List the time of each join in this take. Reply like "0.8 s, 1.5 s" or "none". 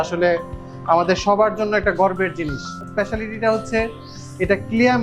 2.8 s

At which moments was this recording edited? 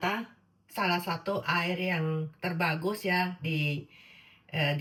none

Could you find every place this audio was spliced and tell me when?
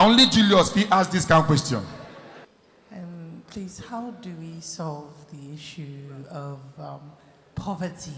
2.5 s

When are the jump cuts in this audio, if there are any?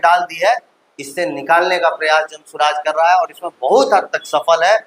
none

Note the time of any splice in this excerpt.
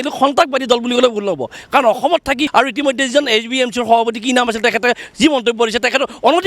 2.4 s

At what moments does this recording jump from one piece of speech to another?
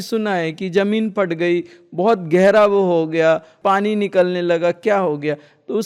none

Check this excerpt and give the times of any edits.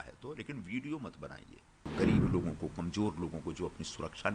1.9 s

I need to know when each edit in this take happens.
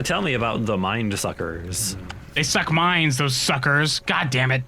2.6 s

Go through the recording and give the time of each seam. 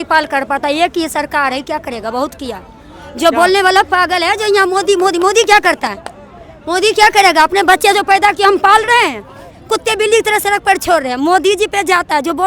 none

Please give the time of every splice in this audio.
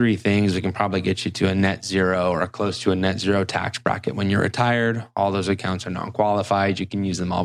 none

